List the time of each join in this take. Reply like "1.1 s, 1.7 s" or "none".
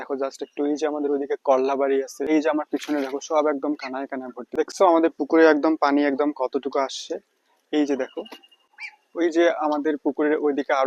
2.3 s, 4.4 s